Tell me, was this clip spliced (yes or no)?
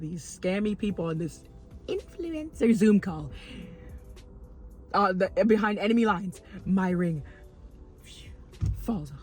no